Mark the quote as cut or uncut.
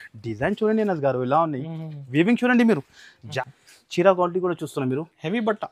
cut